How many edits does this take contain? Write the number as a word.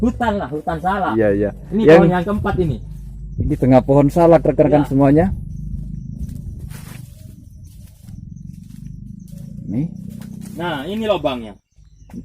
one